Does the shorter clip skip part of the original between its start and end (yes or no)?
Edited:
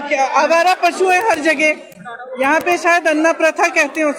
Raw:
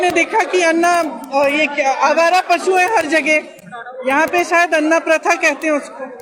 no